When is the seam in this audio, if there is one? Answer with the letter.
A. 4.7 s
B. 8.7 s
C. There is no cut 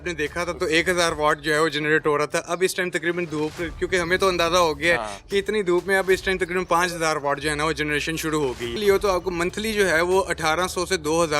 B